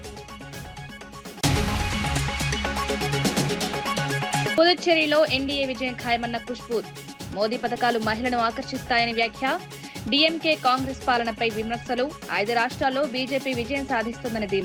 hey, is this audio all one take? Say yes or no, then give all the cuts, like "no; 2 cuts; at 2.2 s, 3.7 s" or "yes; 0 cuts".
yes; 0 cuts